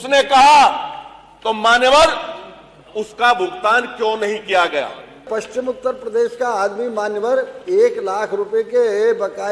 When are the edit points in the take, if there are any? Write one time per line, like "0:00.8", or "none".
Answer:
0:05.2

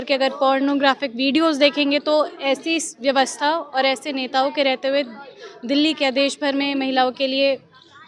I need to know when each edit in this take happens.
none

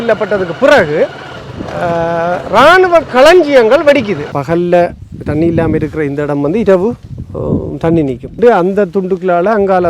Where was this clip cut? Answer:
0:04.3
0:08.3

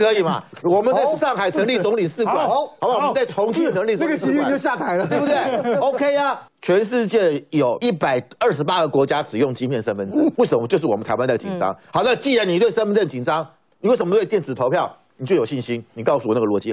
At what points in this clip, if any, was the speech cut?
0:06.4
0:07.8
0:10.3

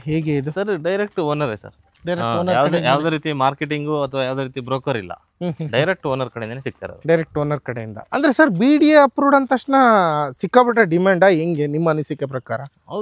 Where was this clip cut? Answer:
0:07.9

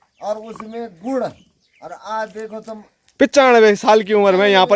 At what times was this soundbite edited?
none

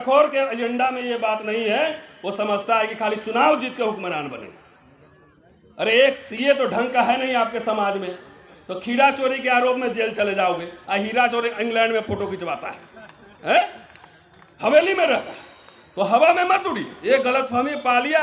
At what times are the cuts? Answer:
0:16.9

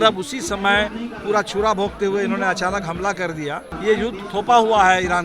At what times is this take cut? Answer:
0:03.7

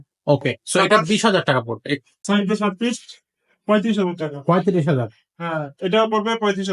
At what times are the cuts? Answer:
0:02.1

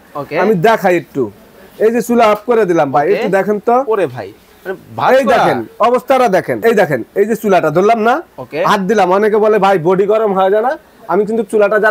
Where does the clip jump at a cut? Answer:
0:06.6

